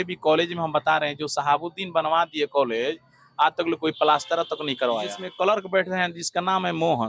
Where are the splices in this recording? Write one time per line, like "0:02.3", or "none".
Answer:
0:05.2